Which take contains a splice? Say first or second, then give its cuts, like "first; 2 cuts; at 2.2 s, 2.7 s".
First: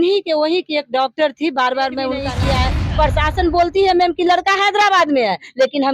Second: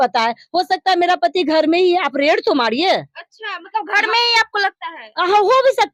first; 1 cut; at 2.3 s